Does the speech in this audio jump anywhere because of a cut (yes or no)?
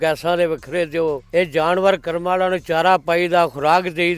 yes